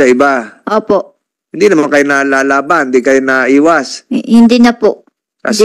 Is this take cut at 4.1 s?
no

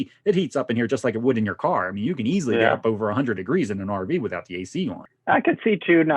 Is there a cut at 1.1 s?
no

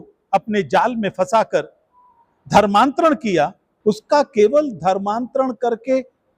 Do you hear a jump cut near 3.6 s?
yes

